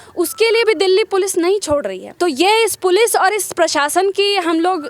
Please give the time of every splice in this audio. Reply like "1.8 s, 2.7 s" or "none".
2.0 s